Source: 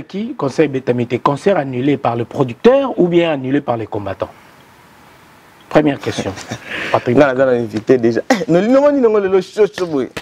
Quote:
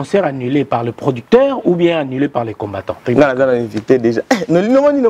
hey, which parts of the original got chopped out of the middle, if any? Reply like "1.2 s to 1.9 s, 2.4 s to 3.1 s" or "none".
4.4 s to 7.0 s

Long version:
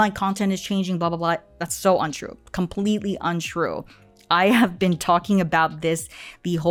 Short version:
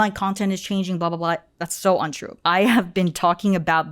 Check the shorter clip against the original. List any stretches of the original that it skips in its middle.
2.2 s to 4.1 s

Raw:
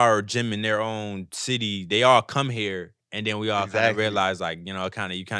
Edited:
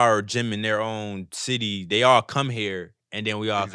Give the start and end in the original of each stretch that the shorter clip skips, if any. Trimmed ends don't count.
none

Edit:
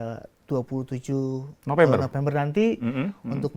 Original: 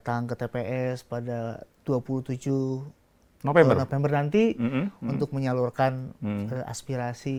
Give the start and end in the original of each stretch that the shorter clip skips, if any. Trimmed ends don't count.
2.9 s to 3.3 s

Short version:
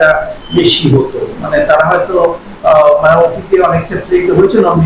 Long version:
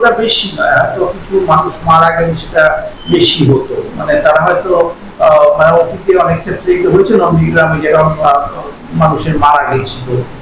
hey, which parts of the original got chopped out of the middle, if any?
none

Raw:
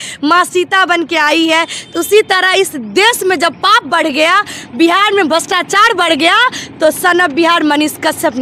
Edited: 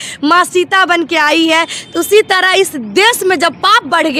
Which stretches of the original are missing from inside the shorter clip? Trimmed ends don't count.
none

